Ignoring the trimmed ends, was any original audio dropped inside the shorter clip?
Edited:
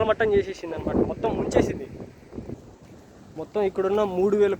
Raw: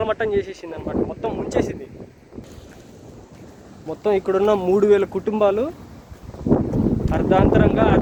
yes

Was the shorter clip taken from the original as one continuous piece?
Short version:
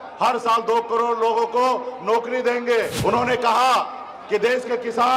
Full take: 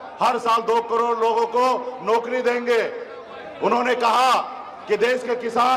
no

